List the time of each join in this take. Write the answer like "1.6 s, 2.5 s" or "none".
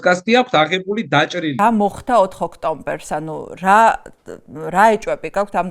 1.6 s